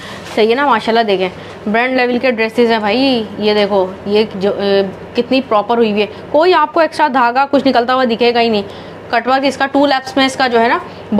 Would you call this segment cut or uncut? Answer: uncut